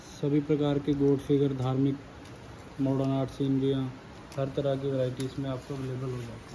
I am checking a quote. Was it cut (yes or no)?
no